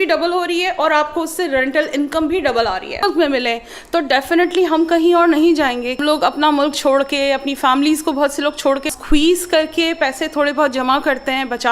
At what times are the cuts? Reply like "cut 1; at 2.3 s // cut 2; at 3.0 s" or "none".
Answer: cut 1; at 3.0 s // cut 2; at 6.0 s // cut 3; at 8.9 s